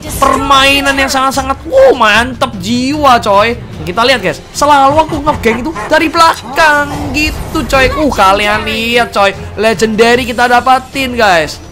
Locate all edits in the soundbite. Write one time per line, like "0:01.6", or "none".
0:03.7